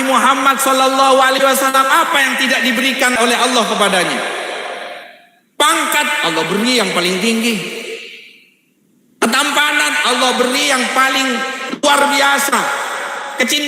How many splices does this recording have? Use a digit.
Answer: 1